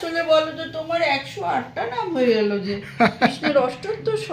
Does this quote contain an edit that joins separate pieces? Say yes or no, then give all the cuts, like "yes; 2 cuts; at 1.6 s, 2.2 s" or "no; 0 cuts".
no; 0 cuts